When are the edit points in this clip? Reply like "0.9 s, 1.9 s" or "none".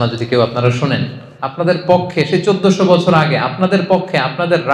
1.4 s